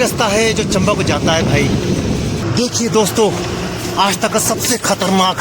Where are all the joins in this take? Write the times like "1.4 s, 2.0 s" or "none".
2.4 s